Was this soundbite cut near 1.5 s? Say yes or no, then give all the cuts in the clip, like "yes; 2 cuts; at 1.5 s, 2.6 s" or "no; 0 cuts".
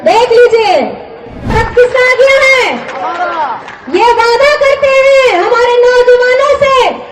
yes; 1 cut; at 1.5 s